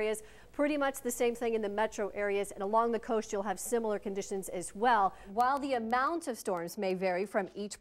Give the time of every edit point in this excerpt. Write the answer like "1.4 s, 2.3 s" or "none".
5.3 s